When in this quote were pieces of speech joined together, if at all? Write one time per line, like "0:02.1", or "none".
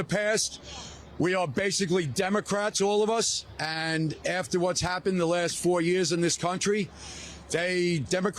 none